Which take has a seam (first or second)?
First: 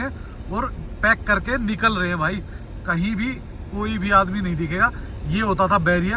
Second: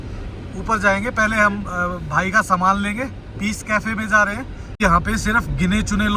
second